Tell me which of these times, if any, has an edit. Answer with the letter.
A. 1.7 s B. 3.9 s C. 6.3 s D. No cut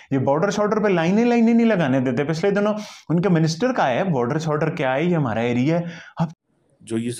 C